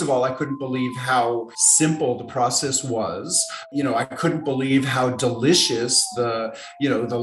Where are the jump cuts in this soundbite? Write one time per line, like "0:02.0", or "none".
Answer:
0:01.6
0:03.7